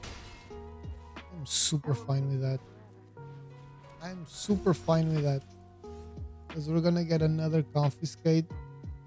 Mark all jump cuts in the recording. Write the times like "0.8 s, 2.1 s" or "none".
none